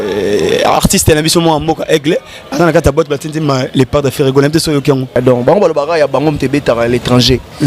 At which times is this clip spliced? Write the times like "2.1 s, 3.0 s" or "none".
5.2 s